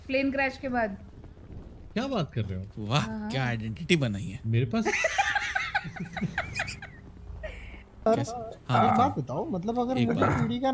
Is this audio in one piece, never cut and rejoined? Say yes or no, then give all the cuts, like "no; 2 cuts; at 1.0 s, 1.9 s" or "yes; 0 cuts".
no; 1 cut; at 8.1 s